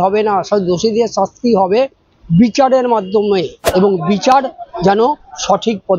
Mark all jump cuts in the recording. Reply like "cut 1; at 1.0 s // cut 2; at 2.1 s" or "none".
cut 1; at 3.6 s